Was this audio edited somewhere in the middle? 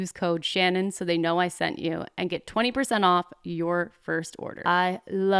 yes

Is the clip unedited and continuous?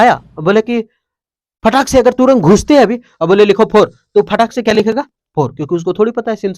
yes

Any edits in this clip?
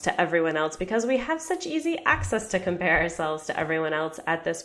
no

